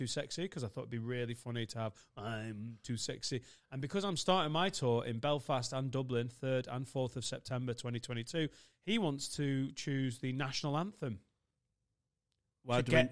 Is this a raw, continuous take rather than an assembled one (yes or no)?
yes